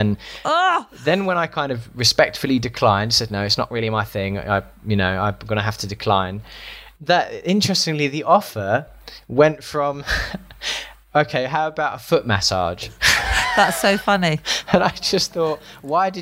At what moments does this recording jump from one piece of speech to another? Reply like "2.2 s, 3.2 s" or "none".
0.9 s